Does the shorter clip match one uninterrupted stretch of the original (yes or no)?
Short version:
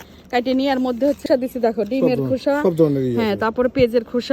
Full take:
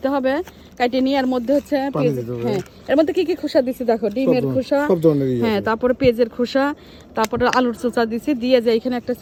no